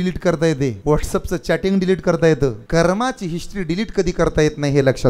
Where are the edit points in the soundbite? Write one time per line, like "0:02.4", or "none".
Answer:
0:00.8
0:02.6